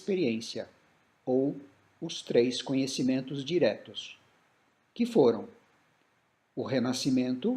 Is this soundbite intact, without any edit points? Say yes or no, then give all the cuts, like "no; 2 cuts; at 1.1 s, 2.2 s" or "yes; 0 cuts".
no; 1 cut; at 2.2 s